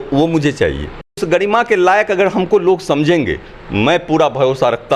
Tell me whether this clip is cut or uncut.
cut